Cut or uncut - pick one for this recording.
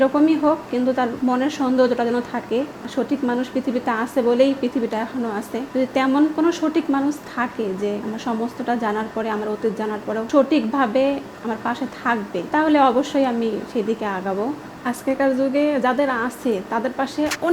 cut